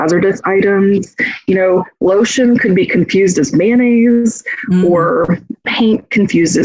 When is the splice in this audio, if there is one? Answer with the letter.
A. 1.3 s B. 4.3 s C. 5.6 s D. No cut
C